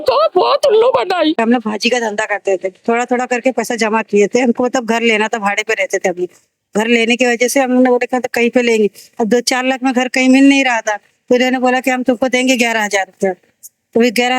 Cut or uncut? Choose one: cut